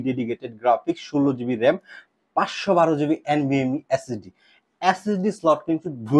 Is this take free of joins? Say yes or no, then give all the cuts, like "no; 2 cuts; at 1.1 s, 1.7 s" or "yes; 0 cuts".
yes; 0 cuts